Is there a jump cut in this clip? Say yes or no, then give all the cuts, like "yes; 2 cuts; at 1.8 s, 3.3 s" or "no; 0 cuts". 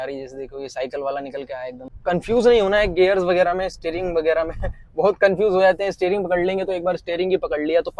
yes; 1 cut; at 1.9 s